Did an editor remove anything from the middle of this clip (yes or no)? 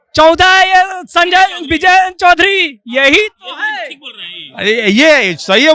no